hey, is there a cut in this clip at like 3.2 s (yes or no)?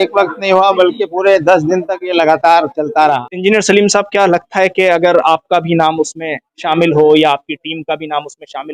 yes